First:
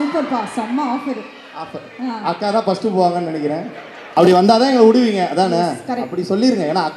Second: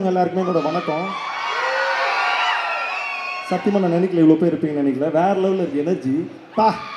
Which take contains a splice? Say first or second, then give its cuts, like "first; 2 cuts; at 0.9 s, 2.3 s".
first; 1 cut; at 4.0 s